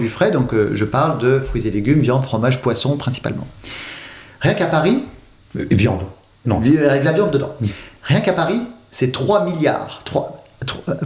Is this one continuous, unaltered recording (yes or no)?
yes